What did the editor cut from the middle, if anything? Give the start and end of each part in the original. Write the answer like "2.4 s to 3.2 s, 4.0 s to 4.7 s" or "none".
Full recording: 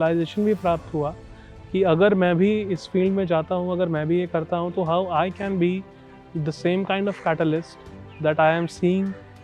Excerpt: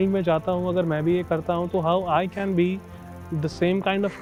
none